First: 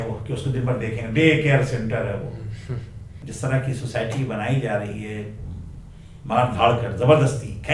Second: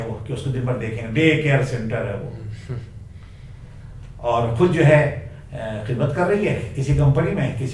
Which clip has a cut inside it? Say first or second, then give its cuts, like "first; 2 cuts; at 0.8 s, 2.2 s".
first; 1 cut; at 3.2 s